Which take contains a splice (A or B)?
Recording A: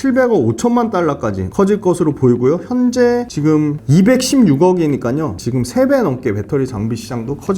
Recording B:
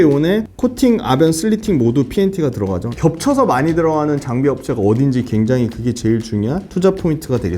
B